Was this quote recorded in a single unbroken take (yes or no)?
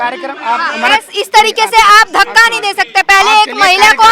yes